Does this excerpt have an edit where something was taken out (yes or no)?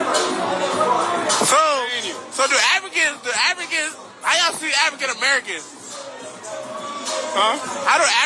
no